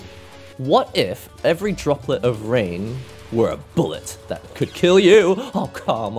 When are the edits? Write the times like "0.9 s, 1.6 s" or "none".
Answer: 1.2 s